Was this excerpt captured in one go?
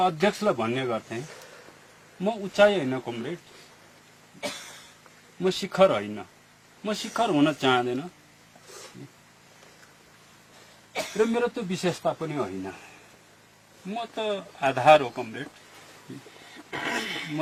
yes; 0 cuts

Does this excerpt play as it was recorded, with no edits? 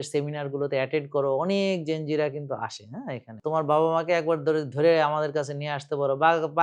no; 1 cut; at 3.4 s

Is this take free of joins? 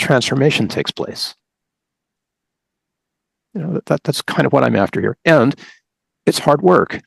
yes; 0 cuts

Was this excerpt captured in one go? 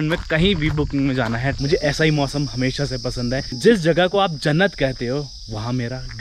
no; 1 cut; at 1.6 s

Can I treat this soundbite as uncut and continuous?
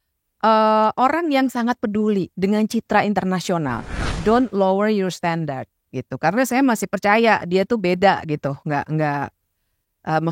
no; 1 cut; at 4.1 s

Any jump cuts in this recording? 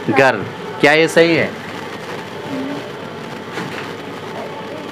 no; 0 cuts

